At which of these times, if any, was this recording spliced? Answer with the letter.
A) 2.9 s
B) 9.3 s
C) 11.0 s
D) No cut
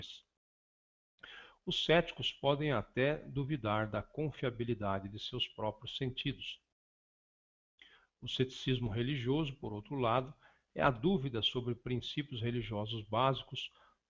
D